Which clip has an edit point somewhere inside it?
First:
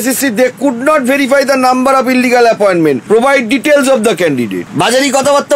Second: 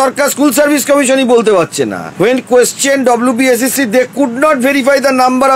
first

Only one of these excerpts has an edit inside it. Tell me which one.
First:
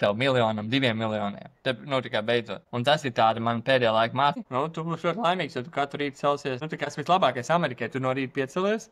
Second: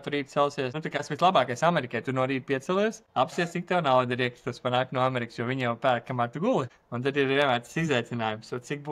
first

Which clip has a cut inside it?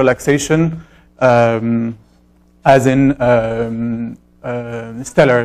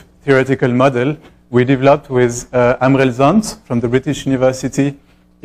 first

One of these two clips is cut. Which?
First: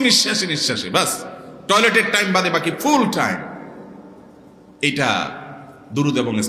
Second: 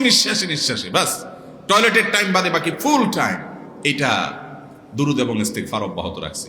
second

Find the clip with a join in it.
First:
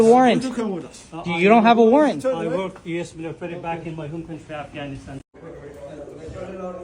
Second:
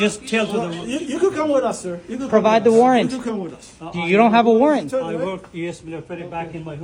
first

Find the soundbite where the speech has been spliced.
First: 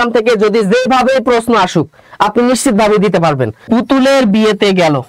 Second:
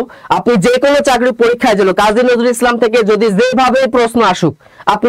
first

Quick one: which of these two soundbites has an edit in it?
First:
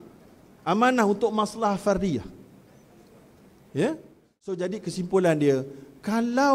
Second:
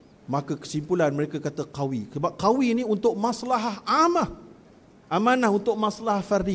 first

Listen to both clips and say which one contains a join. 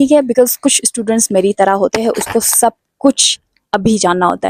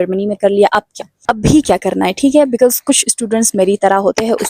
second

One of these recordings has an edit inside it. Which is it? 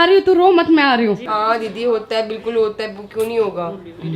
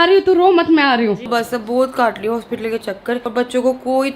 second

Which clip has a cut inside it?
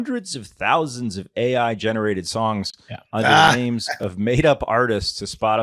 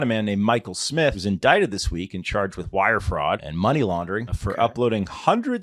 second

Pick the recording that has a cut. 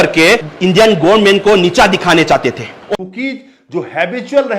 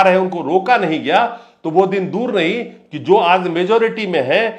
first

